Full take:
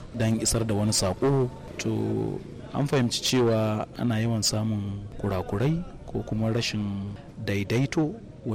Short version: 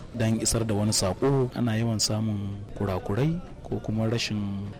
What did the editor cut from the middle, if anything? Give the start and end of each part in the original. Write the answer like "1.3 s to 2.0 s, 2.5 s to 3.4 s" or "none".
1.5 s to 4.0 s